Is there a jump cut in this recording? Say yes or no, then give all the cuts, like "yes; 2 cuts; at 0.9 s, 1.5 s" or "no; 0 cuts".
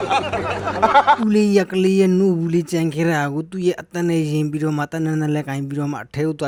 no; 0 cuts